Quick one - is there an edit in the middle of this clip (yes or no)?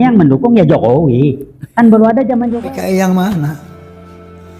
yes